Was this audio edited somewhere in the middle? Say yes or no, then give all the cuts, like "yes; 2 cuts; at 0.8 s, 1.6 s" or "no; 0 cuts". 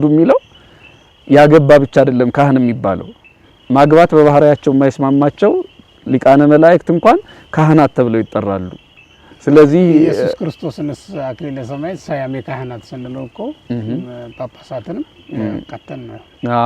no; 0 cuts